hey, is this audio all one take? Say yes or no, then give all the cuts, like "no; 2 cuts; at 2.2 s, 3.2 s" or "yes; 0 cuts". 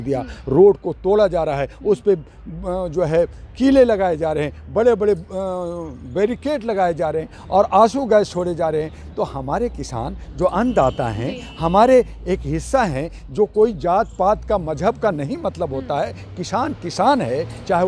yes; 0 cuts